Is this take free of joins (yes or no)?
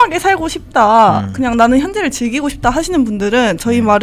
yes